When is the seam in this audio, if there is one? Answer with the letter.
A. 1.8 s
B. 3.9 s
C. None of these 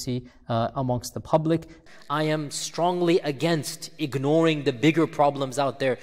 A